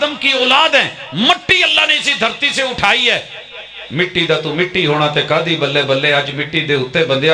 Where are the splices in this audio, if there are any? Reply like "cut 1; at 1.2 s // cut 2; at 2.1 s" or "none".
none